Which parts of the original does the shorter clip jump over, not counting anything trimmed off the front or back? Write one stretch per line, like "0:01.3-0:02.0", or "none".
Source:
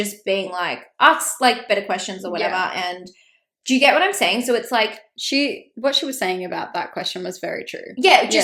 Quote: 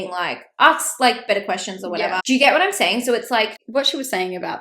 0:02.6-0:03.6
0:05.0-0:05.7